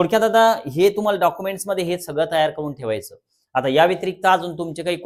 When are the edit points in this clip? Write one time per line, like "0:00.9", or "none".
none